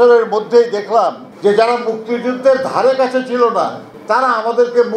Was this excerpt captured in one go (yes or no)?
no